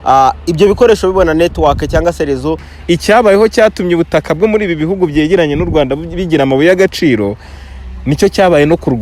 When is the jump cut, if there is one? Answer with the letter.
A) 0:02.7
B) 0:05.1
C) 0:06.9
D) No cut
A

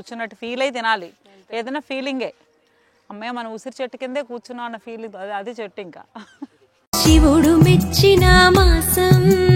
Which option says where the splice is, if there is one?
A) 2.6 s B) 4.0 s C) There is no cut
C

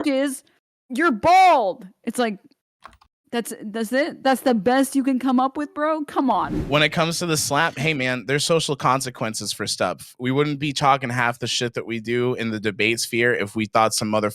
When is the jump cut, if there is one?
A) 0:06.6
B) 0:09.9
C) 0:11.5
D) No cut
A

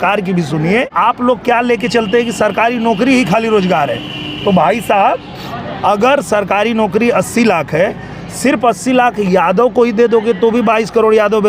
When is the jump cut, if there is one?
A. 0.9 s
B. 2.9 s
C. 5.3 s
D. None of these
A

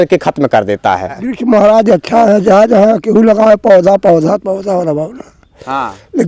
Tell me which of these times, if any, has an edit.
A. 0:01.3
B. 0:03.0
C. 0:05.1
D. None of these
A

